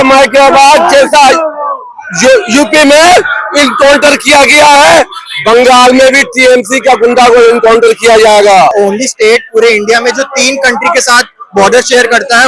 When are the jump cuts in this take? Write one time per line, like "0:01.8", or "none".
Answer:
0:08.7